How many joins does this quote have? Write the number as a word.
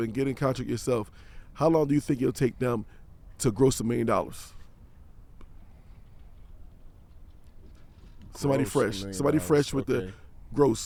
zero